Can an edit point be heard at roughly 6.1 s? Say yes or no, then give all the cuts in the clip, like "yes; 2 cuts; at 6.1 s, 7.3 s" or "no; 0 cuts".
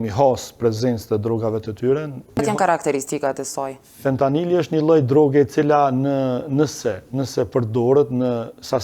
no; 1 cut; at 2.4 s